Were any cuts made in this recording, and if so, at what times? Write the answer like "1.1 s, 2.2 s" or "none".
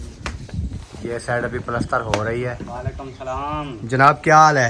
2.6 s